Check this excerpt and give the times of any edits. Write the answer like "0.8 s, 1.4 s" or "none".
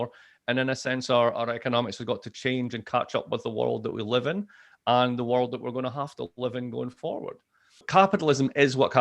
7.8 s